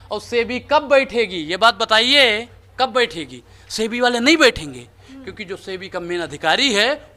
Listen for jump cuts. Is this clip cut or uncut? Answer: uncut